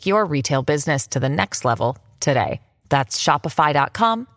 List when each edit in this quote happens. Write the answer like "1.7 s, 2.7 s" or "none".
none